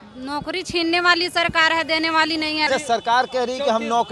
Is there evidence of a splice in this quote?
yes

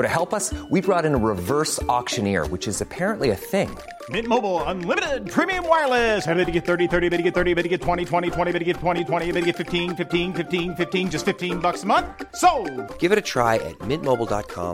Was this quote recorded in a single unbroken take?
yes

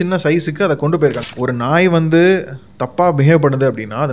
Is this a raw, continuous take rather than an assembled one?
no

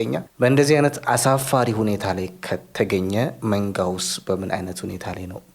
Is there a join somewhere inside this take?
no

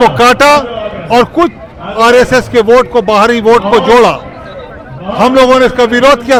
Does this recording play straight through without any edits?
yes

